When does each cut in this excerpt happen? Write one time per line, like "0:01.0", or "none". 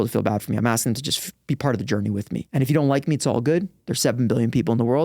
0:02.5